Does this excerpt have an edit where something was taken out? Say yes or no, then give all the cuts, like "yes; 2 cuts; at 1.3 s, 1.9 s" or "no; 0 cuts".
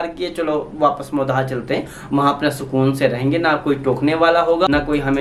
no; 0 cuts